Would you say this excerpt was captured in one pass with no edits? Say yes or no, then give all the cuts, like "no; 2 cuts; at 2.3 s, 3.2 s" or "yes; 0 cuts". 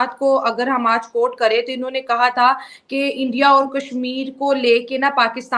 yes; 0 cuts